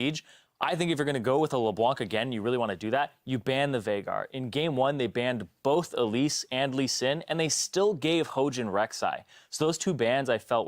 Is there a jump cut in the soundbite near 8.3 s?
yes; 1 cut; at 8.3 s

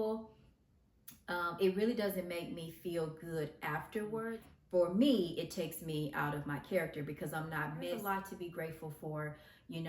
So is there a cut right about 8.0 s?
yes; 2 cuts; at 4.2 s, 8.0 s

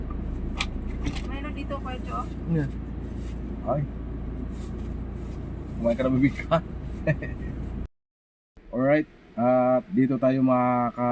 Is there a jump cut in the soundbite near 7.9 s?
yes; 1 cut; at 7.9 s

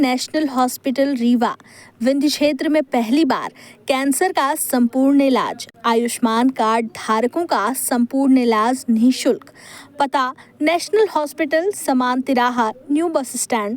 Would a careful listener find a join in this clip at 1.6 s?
no; 0 cuts

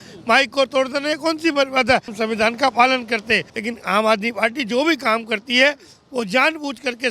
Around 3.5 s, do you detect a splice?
yes; 2 cuts; at 2.1 s, 3.5 s

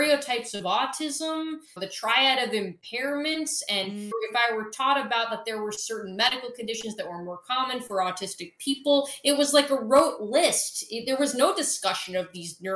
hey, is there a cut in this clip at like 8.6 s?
no; 2 cuts; at 1.7 s, 4.1 s

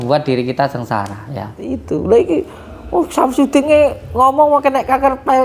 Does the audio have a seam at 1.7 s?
yes; 1 cut; at 1.7 s

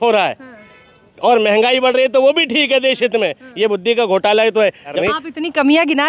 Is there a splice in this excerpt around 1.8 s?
no; 1 cut; at 4.9 s

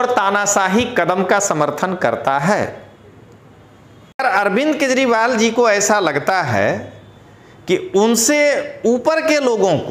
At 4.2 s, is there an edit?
yes; 1 cut; at 4.2 s

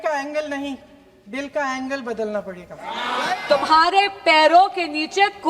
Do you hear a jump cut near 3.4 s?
yes; 1 cut; at 3.4 s

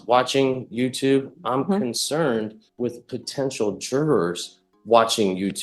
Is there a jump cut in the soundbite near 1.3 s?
no; 1 cut; at 2.6 s

